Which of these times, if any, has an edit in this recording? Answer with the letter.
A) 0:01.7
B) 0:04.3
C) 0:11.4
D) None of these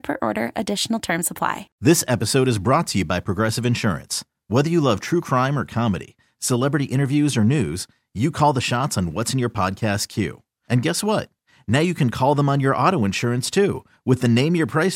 A